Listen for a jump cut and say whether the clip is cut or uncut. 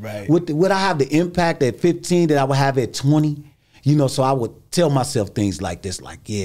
uncut